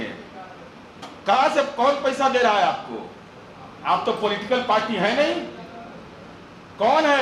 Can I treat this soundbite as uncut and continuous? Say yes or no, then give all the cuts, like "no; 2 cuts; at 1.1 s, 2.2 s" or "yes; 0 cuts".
yes; 0 cuts